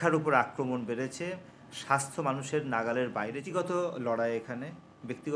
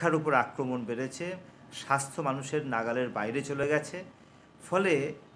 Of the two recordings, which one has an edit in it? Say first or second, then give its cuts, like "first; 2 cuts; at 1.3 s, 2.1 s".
first; 1 cut; at 3.4 s